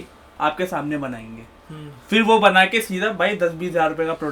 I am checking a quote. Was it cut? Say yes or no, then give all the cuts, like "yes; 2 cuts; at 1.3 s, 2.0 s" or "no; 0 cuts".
no; 0 cuts